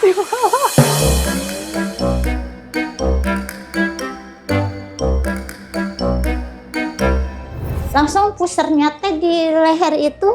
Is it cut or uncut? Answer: cut